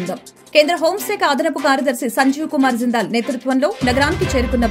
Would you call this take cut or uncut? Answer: uncut